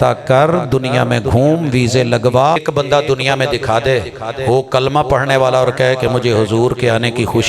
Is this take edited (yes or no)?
yes